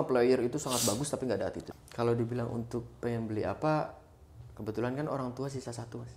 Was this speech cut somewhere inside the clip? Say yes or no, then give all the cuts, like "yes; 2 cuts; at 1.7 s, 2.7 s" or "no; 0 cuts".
yes; 1 cut; at 1.6 s